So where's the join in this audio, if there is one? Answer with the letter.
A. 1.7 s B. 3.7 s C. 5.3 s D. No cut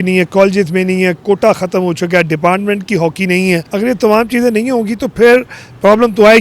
B